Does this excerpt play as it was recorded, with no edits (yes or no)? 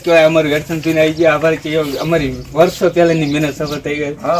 yes